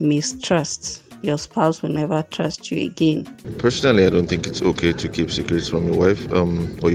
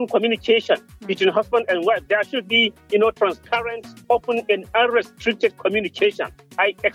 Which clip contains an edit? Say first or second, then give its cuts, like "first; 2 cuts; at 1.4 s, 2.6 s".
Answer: first; 1 cut; at 3.4 s